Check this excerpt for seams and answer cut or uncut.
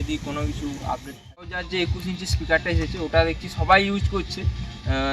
cut